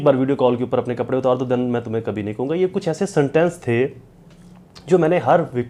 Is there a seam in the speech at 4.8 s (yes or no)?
no